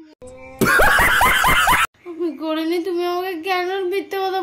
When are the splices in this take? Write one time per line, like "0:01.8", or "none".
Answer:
0:01.8